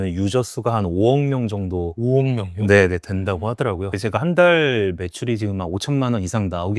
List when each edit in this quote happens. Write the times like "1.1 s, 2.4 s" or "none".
4.0 s